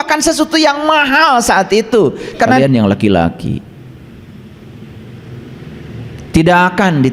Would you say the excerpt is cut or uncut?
cut